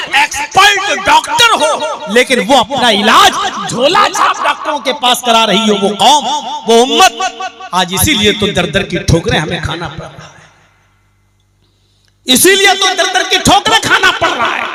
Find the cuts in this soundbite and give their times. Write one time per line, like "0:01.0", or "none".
none